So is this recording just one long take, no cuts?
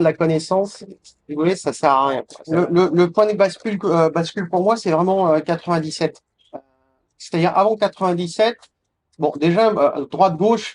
no; 1 cut; at 2.3 s

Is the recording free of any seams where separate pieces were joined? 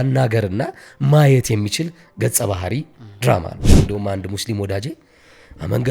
no; 1 cut; at 3.6 s

